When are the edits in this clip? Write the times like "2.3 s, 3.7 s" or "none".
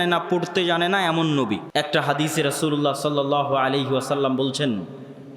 1.7 s